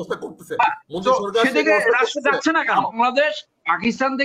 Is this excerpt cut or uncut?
cut